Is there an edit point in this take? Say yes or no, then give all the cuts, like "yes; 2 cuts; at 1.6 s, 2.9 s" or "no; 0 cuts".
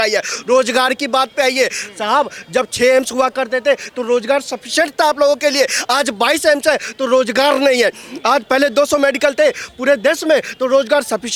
no; 0 cuts